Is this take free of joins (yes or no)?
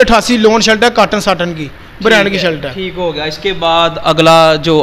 yes